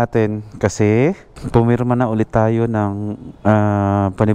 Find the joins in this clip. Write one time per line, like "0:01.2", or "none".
0:01.3